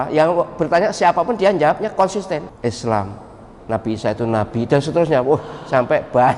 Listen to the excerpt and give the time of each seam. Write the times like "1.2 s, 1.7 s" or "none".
2.5 s